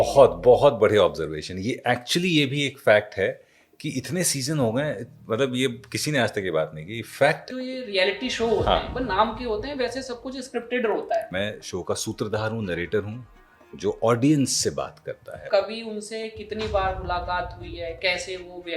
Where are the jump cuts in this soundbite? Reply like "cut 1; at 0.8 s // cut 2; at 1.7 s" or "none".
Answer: cut 1; at 7.5 s // cut 2; at 11.3 s // cut 3; at 15.5 s